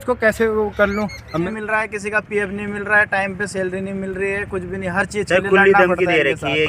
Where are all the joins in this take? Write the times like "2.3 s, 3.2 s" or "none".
1.5 s